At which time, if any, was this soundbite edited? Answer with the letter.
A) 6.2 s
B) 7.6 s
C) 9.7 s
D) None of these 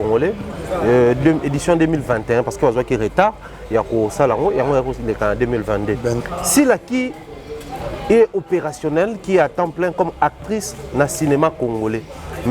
A